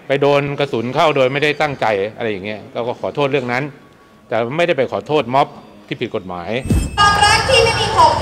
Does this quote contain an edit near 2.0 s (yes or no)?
no